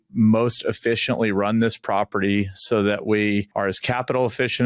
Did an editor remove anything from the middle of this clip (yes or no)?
yes